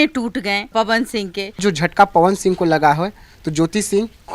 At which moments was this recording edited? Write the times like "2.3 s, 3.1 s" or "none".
1.6 s